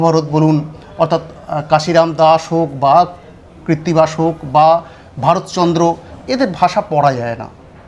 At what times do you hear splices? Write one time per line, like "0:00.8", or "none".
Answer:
none

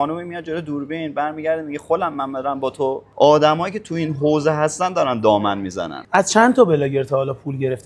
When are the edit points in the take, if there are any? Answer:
0:03.0
0:06.0

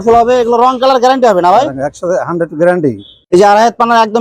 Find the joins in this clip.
0:03.2

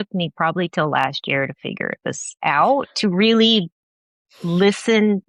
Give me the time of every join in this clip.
none

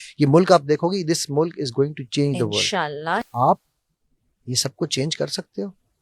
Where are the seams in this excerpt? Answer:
0:03.3

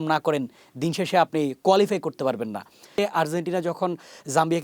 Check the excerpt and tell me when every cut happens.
0:02.9

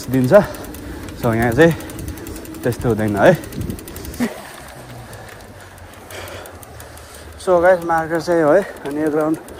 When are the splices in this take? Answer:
0:04.2

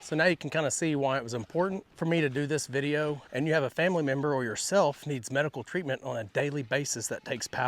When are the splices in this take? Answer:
0:01.9
0:03.2

